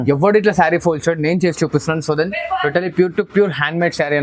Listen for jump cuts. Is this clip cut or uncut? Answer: uncut